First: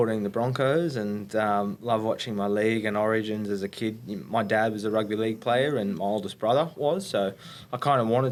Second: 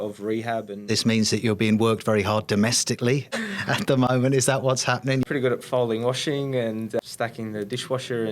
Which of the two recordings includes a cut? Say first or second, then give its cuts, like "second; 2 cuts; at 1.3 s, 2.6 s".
second; 4 cuts; at 0.8 s, 3.3 s, 5.2 s, 7.0 s